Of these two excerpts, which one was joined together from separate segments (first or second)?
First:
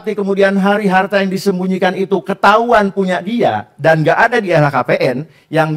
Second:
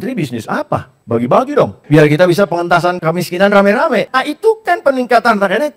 second